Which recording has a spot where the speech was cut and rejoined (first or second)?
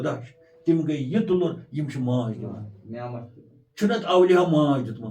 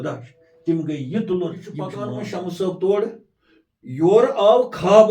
second